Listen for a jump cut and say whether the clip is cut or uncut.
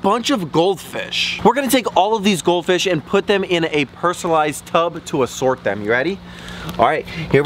uncut